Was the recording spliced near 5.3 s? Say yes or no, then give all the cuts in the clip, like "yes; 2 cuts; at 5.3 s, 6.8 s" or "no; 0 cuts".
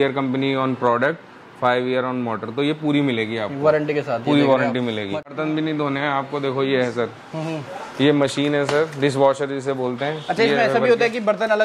yes; 1 cut; at 5.3 s